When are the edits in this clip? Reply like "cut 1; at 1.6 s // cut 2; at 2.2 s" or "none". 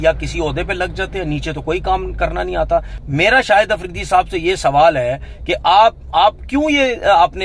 cut 1; at 3.0 s